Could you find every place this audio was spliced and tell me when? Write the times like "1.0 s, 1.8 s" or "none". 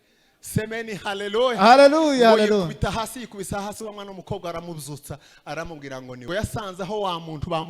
6.1 s